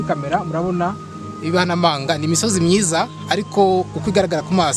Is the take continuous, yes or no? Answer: yes